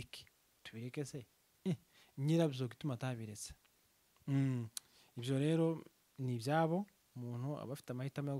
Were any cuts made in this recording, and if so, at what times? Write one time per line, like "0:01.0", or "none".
none